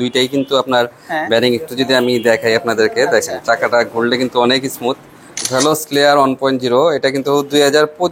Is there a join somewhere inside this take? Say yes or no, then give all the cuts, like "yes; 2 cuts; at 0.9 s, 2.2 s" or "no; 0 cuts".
yes; 1 cut; at 5.4 s